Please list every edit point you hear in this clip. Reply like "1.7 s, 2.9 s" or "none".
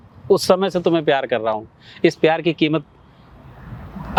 none